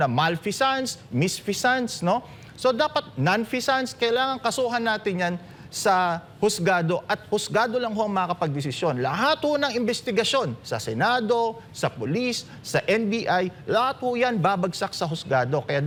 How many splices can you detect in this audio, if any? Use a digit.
0